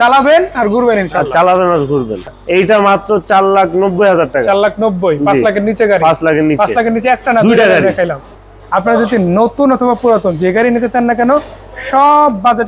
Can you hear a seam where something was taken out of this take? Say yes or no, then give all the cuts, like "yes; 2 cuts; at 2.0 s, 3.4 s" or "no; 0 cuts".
yes; 2 cuts; at 2.2 s, 8.3 s